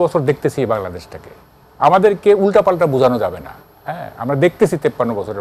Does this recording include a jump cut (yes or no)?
no